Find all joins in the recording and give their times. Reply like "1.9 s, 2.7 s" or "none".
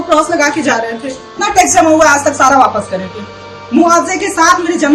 1.3 s